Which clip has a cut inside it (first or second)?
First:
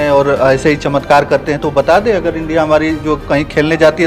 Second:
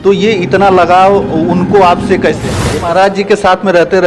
second